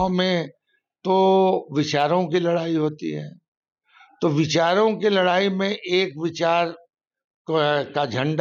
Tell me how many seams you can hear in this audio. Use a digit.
0